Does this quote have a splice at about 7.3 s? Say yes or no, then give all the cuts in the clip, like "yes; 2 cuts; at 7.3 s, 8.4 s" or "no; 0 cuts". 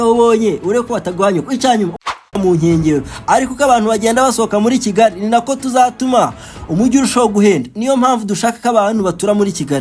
no; 1 cut; at 2.0 s